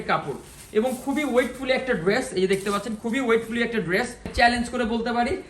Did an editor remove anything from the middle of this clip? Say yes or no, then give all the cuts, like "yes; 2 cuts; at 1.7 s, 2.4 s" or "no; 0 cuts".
yes; 1 cut; at 4.3 s